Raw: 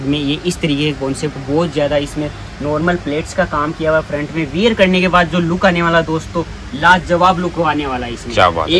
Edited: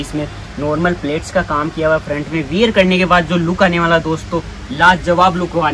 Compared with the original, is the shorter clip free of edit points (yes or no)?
yes